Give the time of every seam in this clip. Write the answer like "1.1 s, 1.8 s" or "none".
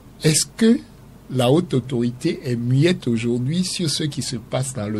none